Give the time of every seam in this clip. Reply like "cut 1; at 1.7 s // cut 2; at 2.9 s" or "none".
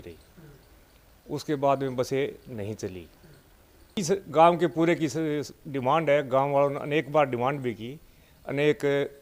cut 1; at 4.0 s